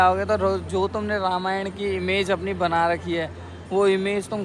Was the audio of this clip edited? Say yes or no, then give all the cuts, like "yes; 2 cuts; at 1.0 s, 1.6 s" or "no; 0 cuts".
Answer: no; 0 cuts